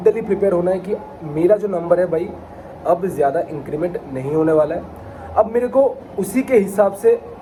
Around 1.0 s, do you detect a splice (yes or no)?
no